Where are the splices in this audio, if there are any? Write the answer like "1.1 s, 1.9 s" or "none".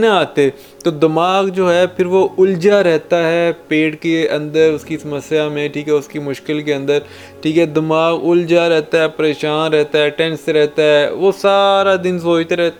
none